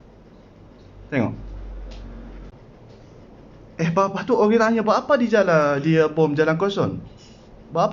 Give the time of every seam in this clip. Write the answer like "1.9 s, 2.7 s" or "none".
2.5 s